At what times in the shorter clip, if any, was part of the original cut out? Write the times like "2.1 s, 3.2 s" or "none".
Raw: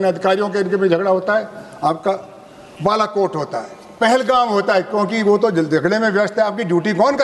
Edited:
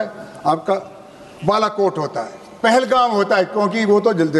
none